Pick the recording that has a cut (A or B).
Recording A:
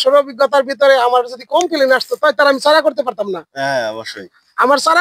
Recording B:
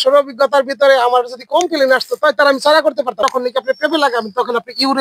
B